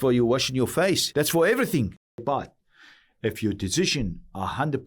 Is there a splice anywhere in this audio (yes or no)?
yes